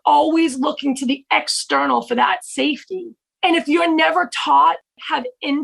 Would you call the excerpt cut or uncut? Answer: cut